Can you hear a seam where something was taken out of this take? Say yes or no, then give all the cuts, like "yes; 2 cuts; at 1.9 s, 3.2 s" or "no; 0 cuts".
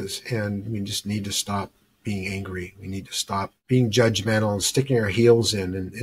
yes; 1 cut; at 3.6 s